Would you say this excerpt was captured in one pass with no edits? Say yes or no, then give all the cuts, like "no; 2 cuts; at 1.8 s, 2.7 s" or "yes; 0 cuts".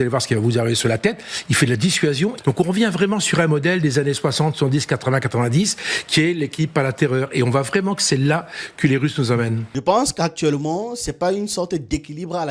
no; 2 cuts; at 2.4 s, 9.7 s